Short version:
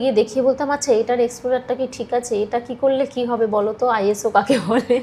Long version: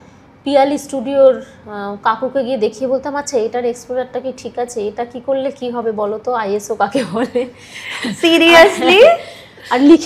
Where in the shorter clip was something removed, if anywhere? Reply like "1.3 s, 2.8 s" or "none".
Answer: none